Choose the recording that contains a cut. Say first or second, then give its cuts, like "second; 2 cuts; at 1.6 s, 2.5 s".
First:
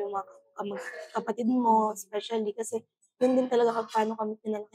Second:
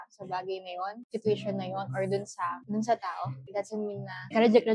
second; 3 cuts; at 1.0 s, 2.6 s, 3.8 s